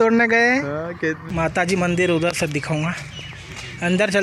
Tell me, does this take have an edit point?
yes; 1 cut; at 1.2 s

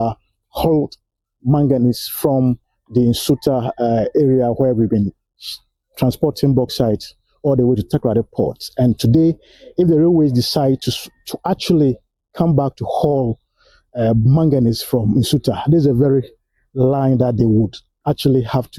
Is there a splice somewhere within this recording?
no; 0 cuts

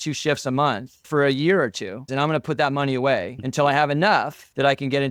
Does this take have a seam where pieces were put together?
no; 0 cuts

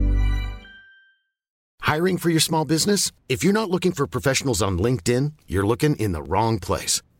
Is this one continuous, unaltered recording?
no; 1 cut; at 1.5 s

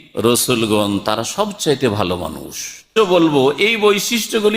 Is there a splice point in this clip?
yes; 1 cut; at 2.9 s

